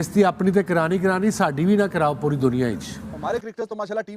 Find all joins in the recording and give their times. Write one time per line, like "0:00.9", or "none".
0:03.1